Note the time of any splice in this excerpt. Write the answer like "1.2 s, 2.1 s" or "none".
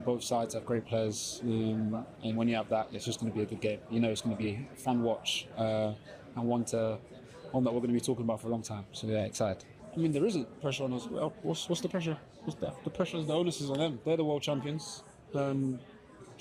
none

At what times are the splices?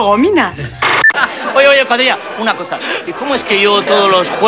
1.2 s

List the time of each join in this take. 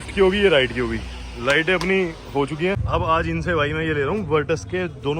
2.8 s

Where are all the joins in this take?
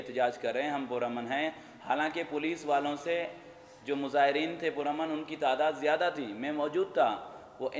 none

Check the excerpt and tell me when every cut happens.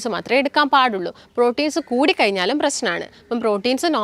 none

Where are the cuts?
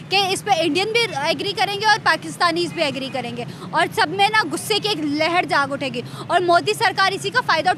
none

